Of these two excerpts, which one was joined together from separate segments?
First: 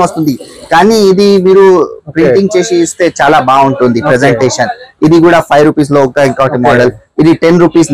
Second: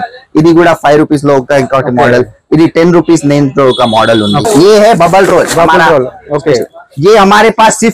second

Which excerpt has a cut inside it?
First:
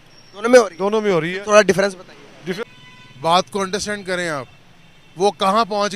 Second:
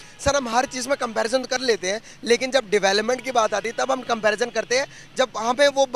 first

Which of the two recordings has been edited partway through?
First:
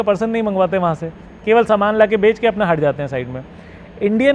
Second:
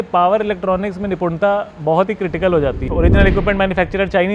second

